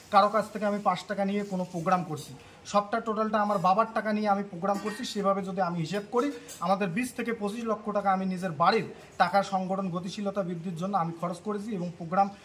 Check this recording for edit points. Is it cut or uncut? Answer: uncut